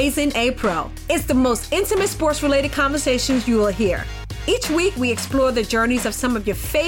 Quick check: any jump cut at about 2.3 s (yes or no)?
no